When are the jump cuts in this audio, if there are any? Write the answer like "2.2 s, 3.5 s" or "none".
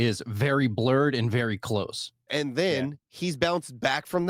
2.2 s